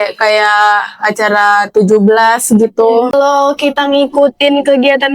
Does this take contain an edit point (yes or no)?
yes